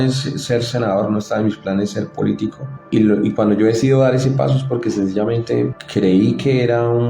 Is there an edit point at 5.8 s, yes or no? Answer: yes